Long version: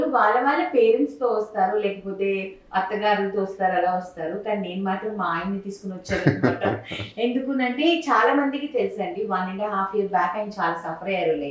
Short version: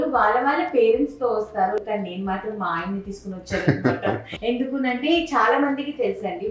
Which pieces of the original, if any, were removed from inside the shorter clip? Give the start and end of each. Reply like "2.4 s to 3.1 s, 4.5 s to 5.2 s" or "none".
1.8 s to 4.4 s, 6.9 s to 7.0 s